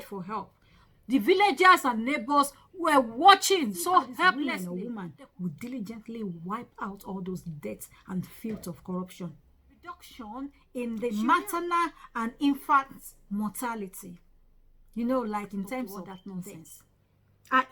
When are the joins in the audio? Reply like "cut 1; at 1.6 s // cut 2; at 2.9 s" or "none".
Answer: cut 1; at 4.5 s // cut 2; at 10.1 s // cut 3; at 16.2 s